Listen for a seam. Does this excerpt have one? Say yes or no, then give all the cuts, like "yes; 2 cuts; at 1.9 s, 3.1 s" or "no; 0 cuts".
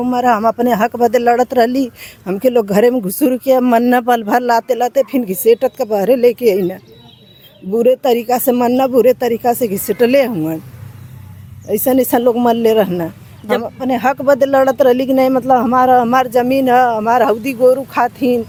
no; 0 cuts